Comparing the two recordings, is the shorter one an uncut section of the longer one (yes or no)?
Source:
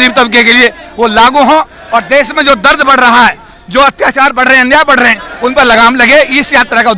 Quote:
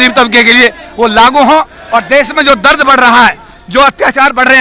yes